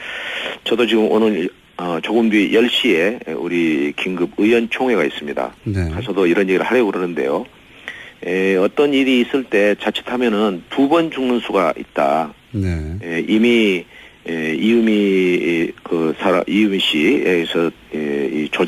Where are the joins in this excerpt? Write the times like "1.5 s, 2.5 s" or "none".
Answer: 7.5 s